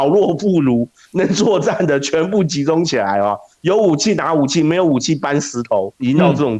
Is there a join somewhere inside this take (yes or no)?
no